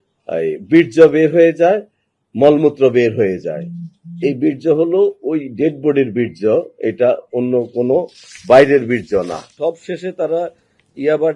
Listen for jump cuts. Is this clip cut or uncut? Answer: cut